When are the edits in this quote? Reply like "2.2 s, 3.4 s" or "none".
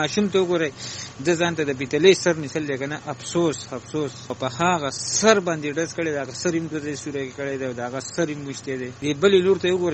4.2 s, 8.9 s